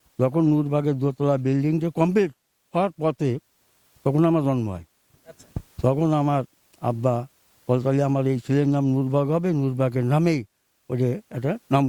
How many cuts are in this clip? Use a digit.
0